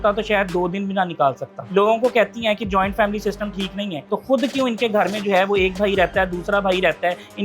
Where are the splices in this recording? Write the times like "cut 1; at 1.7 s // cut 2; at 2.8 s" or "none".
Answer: cut 1; at 1.5 s // cut 2; at 4.0 s